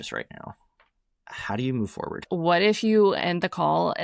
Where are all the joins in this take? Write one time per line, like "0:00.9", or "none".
0:02.2